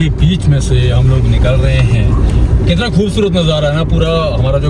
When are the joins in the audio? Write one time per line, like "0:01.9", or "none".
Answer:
none